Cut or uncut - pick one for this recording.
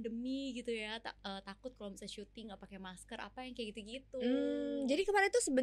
uncut